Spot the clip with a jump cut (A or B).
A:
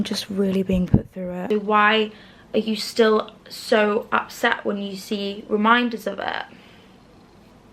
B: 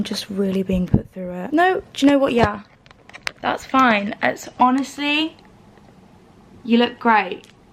A